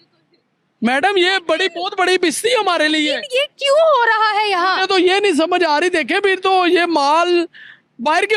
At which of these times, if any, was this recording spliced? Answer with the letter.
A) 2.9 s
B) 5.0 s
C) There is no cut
C